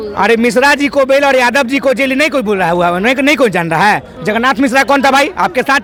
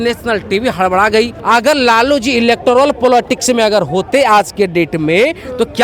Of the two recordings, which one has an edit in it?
second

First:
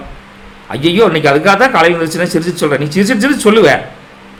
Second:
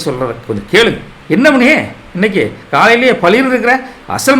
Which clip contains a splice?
second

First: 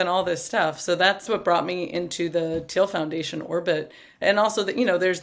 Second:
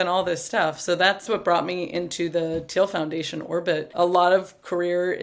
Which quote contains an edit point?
second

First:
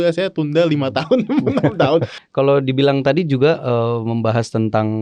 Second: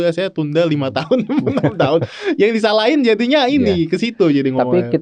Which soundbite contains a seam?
first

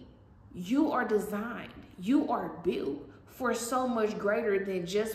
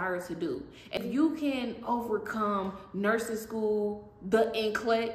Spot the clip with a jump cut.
second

